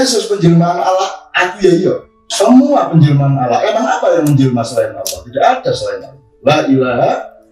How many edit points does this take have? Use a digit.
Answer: 1